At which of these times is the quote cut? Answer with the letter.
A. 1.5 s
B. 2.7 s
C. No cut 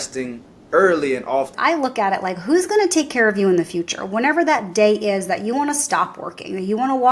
A